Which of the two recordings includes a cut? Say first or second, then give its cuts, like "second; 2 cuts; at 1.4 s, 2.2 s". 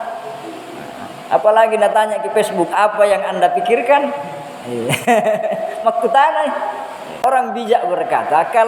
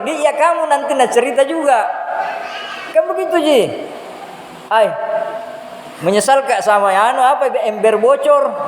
first; 1 cut; at 7.2 s